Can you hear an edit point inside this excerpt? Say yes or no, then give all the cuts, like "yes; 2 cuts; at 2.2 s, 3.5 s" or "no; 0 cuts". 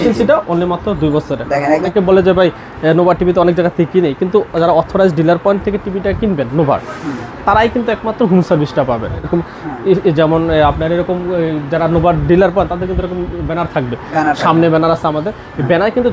yes; 2 cuts; at 1.9 s, 9.3 s